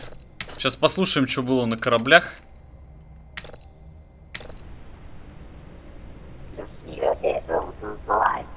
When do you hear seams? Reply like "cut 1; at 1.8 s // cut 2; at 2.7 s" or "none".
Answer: none